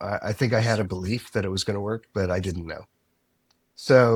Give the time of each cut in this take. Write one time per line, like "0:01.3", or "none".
none